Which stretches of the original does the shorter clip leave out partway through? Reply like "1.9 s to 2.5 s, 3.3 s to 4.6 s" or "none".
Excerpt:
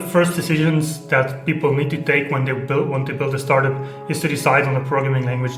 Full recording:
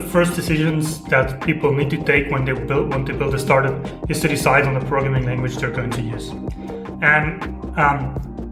none